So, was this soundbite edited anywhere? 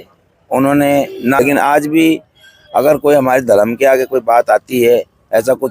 yes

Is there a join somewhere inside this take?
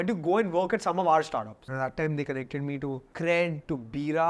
yes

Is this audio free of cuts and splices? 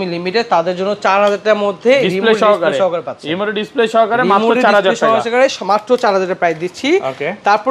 yes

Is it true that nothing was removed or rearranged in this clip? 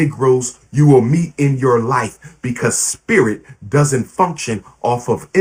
yes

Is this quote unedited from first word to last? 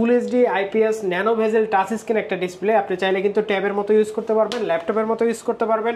yes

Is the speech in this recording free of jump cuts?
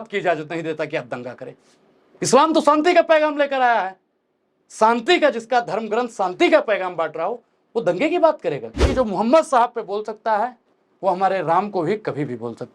no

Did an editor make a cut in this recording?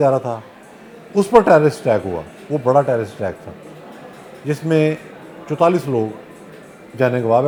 no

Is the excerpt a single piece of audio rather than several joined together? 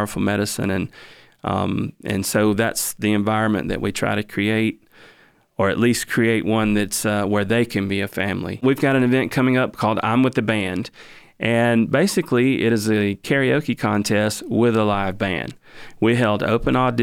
no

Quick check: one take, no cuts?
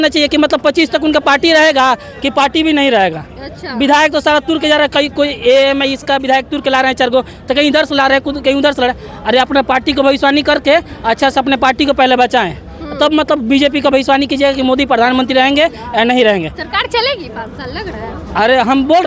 yes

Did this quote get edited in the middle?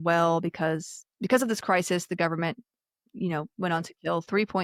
no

